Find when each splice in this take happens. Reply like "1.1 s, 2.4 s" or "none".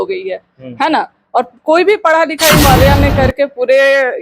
2.7 s